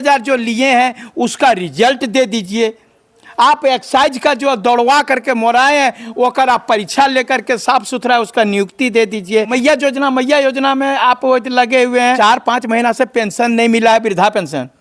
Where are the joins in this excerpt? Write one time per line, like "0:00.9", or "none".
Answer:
0:09.5
0:12.2